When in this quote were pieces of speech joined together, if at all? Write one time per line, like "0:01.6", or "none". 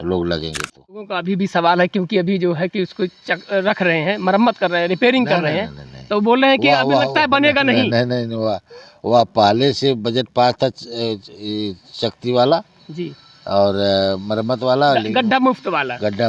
0:01.1